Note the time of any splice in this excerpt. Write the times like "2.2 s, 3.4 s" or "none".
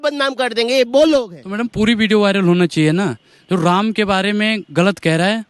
1.4 s